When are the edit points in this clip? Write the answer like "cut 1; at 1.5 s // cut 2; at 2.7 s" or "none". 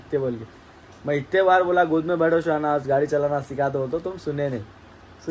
none